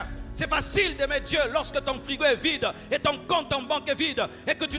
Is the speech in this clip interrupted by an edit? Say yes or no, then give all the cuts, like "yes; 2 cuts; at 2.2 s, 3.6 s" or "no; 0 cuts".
no; 0 cuts